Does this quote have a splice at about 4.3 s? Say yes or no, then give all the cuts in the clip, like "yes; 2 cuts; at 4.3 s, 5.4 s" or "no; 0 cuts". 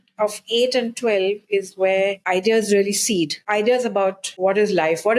yes; 3 cuts; at 2.2 s, 3.4 s, 4.3 s